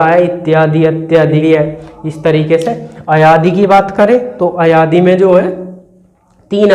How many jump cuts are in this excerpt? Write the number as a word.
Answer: zero